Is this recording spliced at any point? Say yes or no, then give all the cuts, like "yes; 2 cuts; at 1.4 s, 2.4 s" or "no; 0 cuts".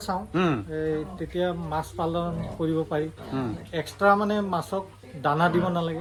no; 0 cuts